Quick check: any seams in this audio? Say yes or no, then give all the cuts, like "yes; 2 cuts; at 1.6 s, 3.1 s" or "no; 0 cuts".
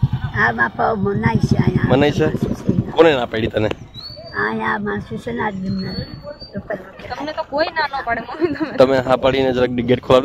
no; 0 cuts